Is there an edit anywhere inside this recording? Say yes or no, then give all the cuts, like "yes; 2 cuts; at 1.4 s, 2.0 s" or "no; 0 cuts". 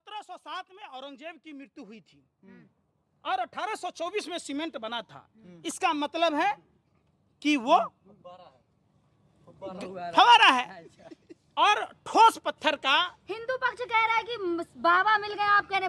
no; 0 cuts